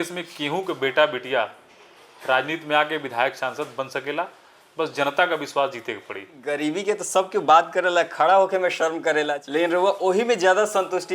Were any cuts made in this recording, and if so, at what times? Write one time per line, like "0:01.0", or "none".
0:06.4
0:09.4